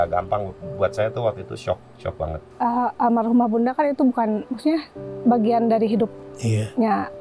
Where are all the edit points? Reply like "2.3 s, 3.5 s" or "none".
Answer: 2.5 s

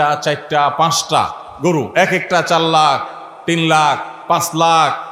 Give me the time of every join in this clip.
none

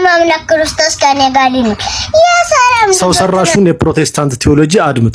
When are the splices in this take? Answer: 3.0 s

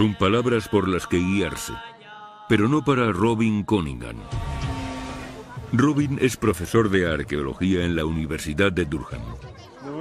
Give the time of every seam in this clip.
4.0 s

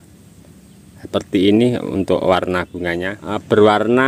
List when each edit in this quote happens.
3.1 s

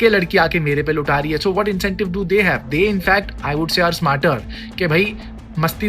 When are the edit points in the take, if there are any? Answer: none

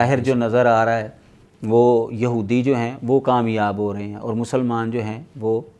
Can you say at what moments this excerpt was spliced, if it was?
none

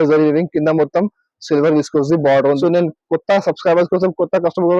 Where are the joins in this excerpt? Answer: 2.6 s

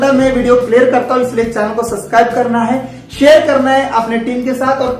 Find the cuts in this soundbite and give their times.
none

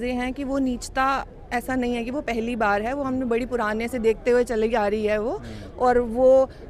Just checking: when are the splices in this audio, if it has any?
none

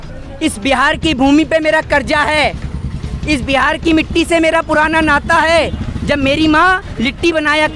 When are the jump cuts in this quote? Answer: none

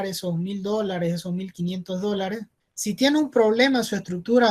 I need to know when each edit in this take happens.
none

